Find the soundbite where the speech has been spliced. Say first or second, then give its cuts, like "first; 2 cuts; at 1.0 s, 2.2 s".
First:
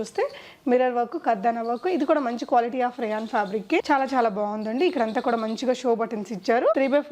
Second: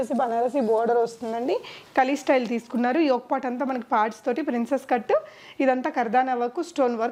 first; 1 cut; at 3.8 s